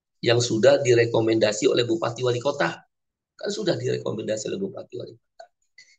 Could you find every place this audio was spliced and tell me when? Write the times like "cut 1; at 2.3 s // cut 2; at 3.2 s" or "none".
none